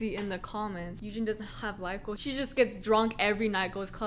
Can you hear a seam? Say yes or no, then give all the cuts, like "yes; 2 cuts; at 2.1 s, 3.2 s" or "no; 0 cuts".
yes; 2 cuts; at 1.0 s, 2.2 s